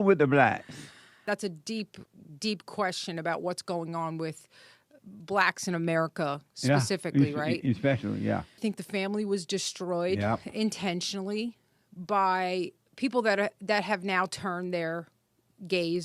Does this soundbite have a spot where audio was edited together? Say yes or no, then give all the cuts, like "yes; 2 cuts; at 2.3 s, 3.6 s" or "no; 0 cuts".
yes; 2 cuts; at 1.2 s, 8.7 s